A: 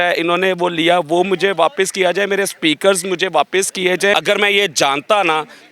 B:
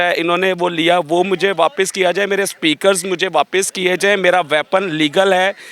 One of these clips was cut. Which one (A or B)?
A